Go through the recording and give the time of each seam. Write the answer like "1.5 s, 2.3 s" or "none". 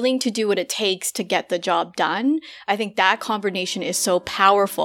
none